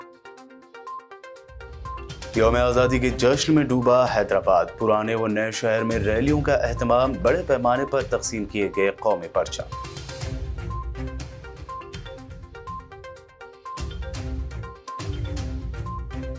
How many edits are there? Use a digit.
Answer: 1